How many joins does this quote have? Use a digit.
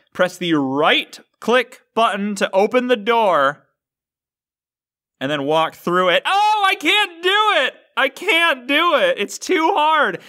0